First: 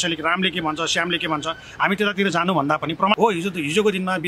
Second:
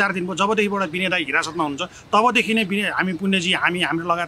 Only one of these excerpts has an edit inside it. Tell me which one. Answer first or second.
first